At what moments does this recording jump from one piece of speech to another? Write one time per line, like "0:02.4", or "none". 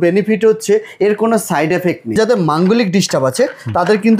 0:02.2